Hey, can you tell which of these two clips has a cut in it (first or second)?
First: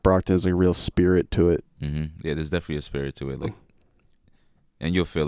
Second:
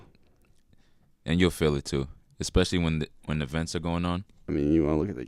second